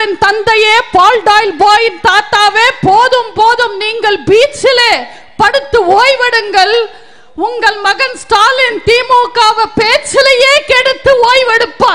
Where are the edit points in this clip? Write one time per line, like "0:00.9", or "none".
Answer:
none